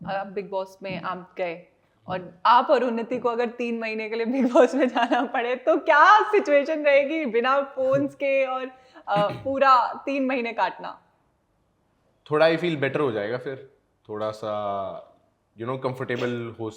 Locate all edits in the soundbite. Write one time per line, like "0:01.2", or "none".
none